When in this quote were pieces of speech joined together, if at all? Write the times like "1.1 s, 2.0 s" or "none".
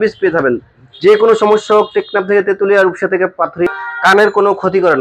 3.7 s